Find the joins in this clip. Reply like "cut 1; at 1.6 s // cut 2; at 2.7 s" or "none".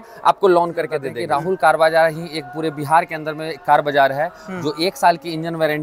cut 1; at 1.1 s